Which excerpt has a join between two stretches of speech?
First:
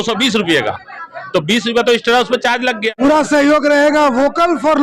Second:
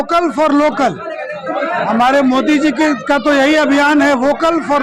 first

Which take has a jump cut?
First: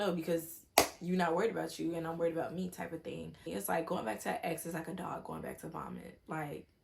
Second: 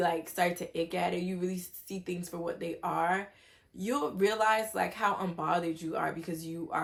first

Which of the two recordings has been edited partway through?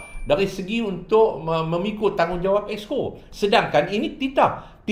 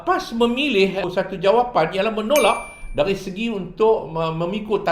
second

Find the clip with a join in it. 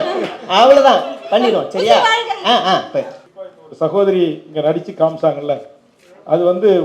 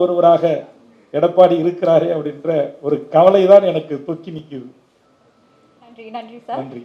first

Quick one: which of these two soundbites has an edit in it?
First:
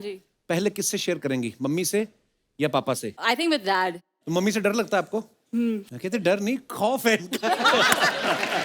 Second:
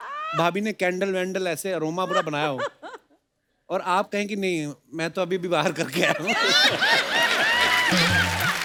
first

